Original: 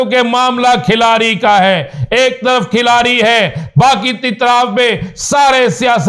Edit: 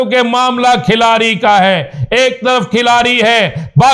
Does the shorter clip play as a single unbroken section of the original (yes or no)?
yes